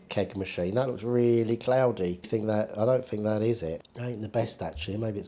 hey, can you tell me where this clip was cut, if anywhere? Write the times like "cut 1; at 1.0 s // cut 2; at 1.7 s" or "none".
cut 1; at 2.3 s // cut 2; at 3.9 s